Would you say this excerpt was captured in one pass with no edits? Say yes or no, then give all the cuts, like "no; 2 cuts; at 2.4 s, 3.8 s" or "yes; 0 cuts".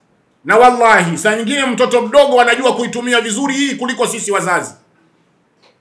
yes; 0 cuts